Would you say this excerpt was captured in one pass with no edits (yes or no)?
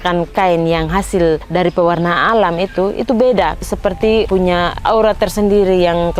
no